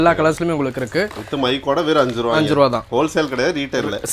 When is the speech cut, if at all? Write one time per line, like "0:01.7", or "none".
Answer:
none